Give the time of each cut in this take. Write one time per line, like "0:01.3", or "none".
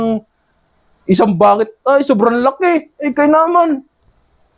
none